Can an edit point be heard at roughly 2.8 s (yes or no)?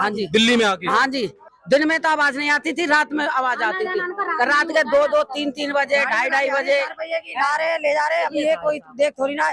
no